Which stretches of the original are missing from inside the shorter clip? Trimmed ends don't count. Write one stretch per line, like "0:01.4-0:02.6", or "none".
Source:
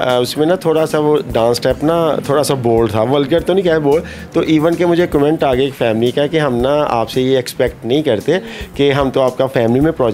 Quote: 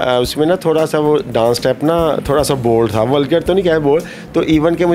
none